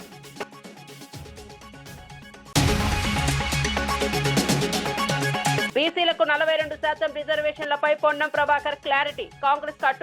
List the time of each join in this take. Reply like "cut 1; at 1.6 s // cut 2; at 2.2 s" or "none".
none